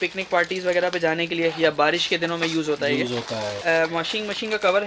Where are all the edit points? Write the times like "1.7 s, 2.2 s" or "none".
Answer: 3.6 s